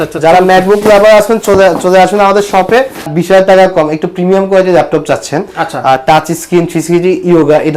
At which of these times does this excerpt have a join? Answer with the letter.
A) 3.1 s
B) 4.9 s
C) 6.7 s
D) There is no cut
A